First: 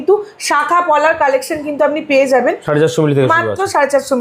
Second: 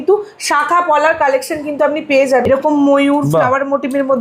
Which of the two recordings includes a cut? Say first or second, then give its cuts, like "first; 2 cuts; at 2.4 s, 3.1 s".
second; 1 cut; at 2.4 s